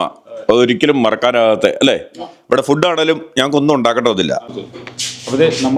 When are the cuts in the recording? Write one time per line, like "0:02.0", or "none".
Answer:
0:04.5